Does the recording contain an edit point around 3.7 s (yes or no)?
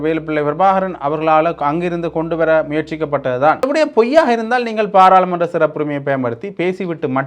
yes